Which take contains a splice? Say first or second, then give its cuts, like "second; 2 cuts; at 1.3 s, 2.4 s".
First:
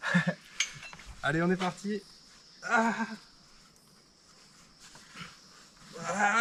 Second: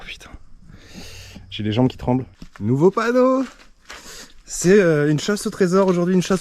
second; 1 cut; at 2.4 s